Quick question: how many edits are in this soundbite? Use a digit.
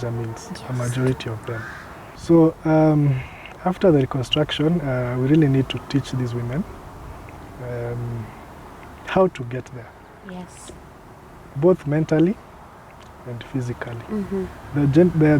0